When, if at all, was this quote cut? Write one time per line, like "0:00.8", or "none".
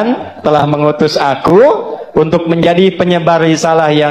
none